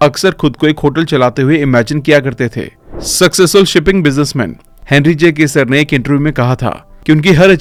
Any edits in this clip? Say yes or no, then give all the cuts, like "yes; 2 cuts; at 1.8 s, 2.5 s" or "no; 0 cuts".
no; 0 cuts